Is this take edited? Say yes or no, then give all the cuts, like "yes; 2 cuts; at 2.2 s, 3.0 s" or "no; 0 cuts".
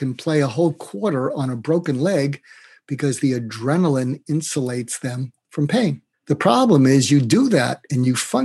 no; 0 cuts